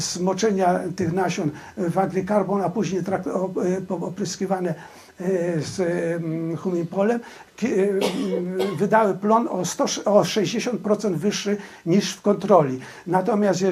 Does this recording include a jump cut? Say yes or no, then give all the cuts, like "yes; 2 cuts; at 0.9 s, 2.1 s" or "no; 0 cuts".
no; 0 cuts